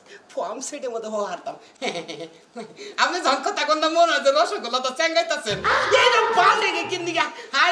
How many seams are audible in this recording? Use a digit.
1